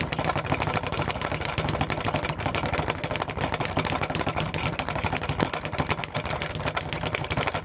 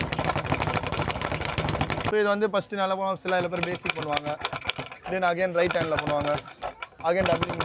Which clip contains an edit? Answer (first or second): second